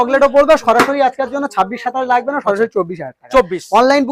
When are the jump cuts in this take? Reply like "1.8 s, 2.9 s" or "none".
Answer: none